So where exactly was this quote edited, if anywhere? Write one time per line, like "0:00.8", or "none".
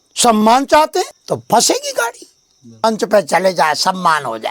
0:01.2
0:02.8